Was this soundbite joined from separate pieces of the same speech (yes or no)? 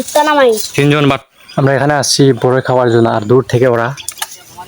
yes